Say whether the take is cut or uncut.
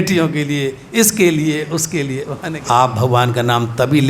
cut